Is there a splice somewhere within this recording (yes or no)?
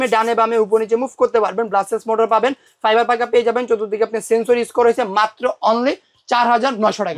no